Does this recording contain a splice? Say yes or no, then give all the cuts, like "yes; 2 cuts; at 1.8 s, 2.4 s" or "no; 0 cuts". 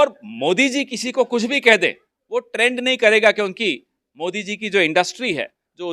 no; 0 cuts